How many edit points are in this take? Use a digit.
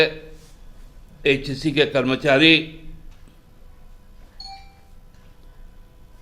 0